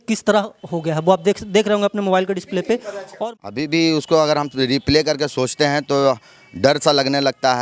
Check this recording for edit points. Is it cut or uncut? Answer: cut